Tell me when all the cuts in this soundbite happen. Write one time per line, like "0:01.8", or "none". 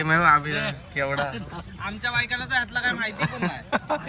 none